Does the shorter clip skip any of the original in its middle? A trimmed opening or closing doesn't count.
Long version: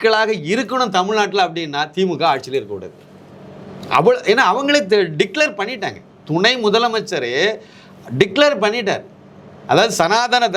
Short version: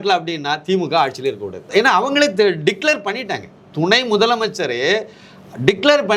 yes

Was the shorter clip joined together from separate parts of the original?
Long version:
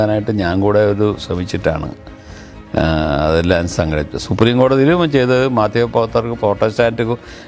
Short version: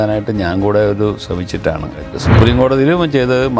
yes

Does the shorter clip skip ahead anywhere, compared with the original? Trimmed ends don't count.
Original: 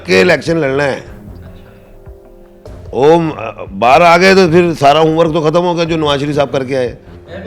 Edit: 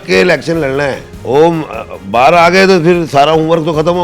yes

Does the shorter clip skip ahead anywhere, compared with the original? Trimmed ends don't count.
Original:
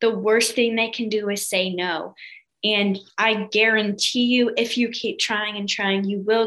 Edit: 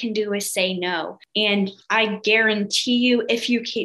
yes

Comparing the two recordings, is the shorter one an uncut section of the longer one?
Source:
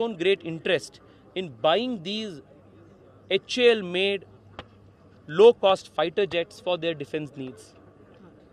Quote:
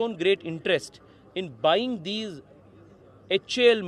yes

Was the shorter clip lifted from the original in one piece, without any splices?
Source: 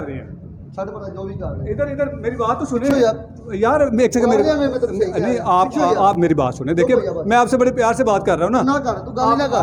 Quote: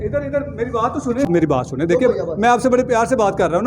no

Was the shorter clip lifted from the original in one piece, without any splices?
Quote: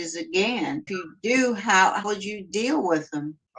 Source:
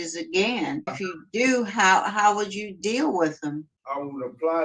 no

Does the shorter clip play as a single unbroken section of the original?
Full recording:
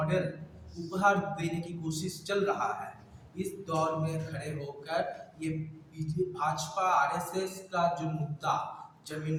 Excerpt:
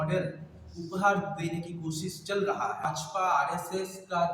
no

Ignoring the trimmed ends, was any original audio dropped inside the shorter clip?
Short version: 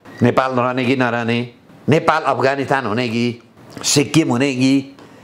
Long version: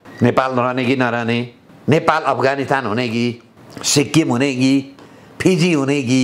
no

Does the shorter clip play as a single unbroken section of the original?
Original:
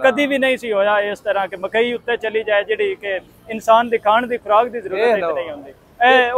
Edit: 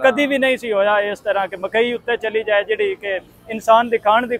yes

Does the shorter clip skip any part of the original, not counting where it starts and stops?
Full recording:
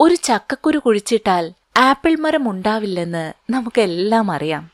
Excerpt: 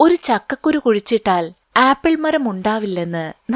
no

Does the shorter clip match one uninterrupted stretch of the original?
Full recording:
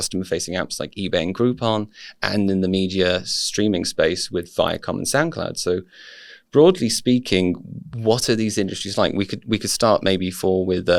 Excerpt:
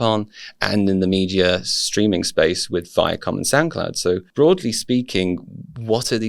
no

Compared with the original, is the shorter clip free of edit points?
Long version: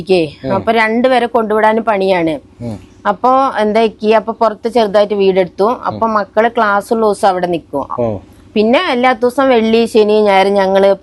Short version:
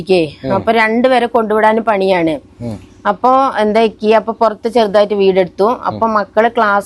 yes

